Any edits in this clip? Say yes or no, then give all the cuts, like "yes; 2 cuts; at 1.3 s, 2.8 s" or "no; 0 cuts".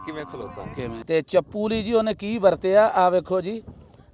yes; 1 cut; at 1.0 s